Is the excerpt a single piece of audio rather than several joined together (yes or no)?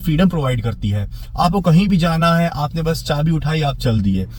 yes